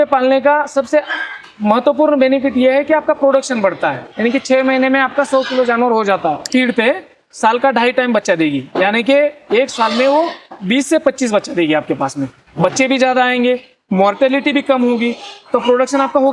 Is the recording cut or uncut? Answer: cut